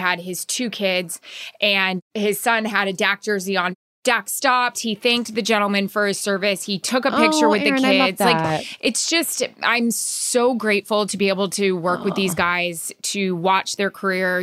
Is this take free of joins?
no; 2 cuts; at 2.0 s, 3.7 s

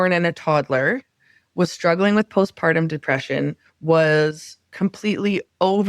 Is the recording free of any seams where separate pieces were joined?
yes; 0 cuts

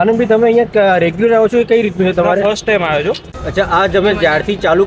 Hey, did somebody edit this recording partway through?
yes; 1 cut; at 3.3 s

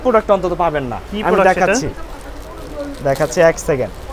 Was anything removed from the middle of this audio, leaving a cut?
no; 0 cuts

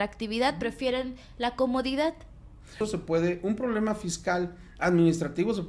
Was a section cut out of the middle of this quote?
yes; 1 cut; at 2.8 s

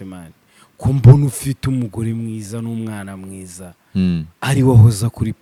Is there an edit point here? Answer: no; 0 cuts

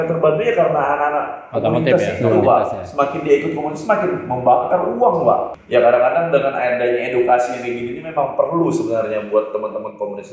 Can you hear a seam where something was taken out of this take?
yes; 1 cut; at 5.5 s

